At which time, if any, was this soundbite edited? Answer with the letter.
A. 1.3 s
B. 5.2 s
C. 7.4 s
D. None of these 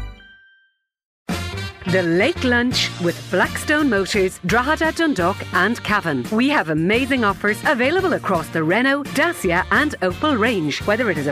A